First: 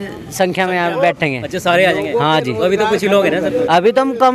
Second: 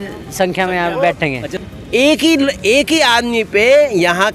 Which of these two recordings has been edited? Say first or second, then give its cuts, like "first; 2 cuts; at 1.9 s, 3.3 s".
second; 1 cut; at 1.5 s